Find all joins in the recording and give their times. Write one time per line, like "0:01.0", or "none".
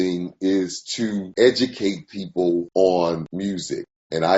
none